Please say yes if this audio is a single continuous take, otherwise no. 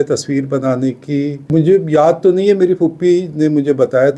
no